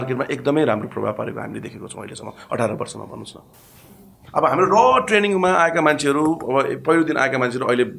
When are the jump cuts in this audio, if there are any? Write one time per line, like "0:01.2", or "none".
none